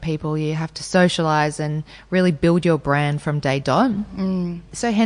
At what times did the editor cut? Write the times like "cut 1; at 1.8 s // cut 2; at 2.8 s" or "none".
none